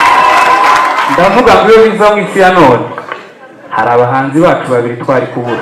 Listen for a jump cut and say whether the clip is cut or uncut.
cut